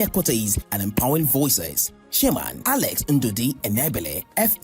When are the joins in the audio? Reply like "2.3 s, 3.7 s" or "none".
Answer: 1.0 s